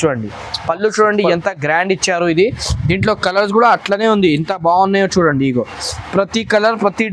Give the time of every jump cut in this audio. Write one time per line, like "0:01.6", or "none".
none